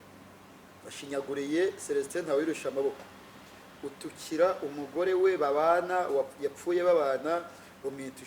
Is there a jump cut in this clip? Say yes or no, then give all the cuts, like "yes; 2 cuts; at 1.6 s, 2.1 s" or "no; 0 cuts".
no; 0 cuts